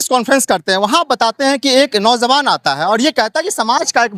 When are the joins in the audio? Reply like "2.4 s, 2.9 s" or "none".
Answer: none